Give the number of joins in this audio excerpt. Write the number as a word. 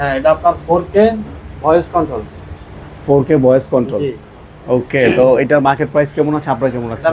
zero